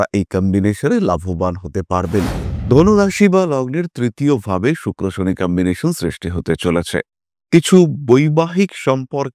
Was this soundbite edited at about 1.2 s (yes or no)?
no